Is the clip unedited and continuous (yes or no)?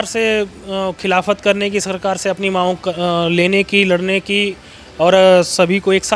yes